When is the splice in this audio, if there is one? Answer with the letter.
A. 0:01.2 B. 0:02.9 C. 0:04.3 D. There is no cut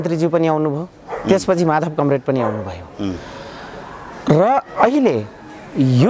D